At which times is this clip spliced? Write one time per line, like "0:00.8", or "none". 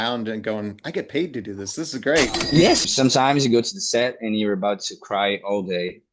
0:03.2